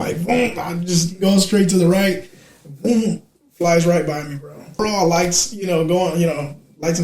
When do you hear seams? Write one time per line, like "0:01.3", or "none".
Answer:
0:04.8